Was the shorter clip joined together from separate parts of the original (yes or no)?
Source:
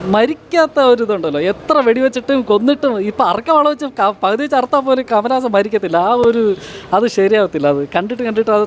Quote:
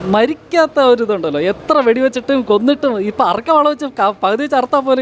no